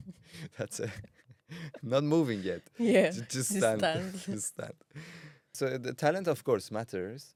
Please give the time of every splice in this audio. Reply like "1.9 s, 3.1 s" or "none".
none